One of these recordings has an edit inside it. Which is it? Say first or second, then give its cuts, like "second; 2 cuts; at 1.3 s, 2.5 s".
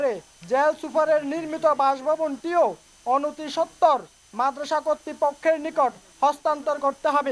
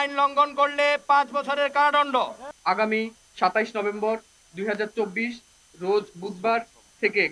second; 1 cut; at 2.4 s